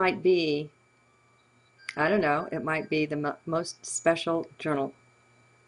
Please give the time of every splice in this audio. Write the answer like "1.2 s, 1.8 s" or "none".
none